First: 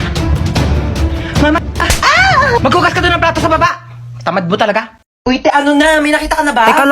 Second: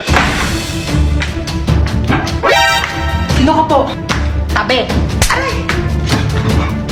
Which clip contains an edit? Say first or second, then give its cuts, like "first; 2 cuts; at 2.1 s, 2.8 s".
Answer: first; 1 cut; at 5.1 s